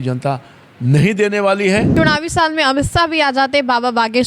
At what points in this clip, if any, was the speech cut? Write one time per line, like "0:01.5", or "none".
0:01.9